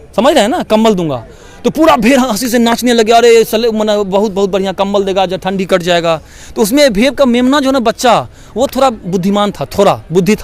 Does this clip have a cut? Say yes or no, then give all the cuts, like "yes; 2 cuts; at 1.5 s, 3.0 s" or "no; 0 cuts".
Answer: no; 0 cuts